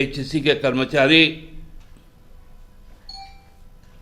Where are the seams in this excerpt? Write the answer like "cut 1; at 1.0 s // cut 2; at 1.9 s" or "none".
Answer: none